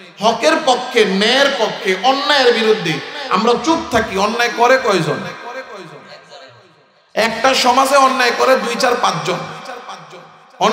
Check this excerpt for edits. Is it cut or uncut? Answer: uncut